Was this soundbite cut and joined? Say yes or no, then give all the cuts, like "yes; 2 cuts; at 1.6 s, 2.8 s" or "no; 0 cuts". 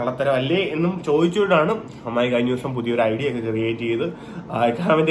no; 0 cuts